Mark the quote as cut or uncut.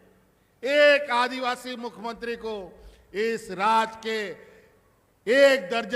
uncut